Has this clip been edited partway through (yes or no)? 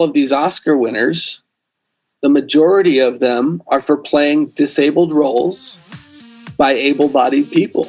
no